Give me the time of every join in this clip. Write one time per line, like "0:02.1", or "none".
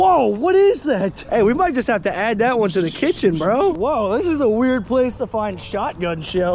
0:01.2
0:03.8